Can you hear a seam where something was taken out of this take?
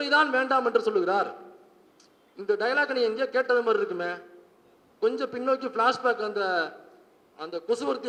no; 0 cuts

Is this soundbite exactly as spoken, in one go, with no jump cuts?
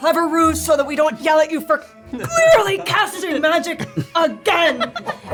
yes; 0 cuts

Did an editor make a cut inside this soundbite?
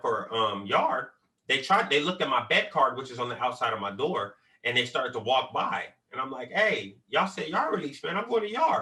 no; 0 cuts

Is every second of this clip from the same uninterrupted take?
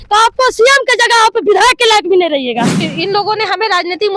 no; 1 cut; at 2.8 s

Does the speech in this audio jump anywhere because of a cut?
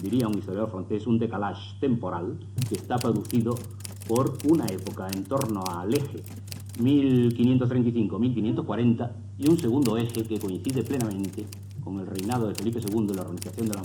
no; 0 cuts

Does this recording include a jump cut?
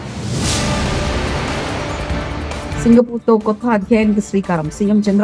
yes; 1 cut; at 2.8 s

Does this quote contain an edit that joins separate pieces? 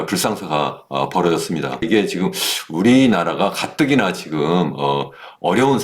yes; 1 cut; at 1.9 s

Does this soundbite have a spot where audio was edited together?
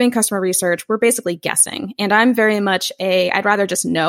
no; 0 cuts

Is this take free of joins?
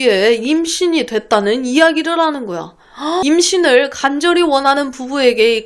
no; 1 cut; at 3.2 s

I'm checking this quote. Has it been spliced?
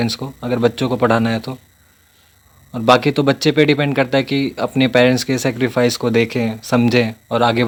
no; 0 cuts

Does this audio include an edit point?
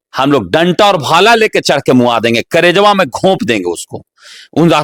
no; 0 cuts

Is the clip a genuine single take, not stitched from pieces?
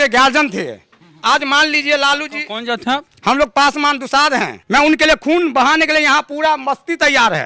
no; 1 cut; at 4.6 s

